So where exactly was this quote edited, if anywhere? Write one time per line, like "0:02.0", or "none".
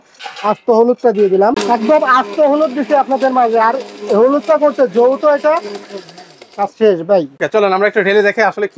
0:01.6
0:07.4